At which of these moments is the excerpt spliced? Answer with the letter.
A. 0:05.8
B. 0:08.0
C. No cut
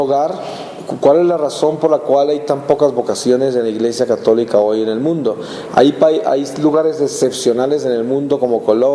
B